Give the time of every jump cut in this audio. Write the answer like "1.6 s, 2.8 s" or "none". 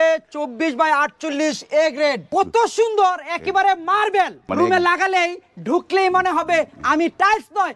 2.3 s, 4.4 s